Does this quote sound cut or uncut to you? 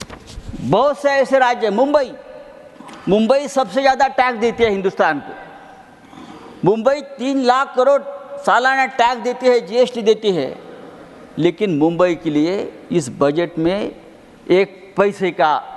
uncut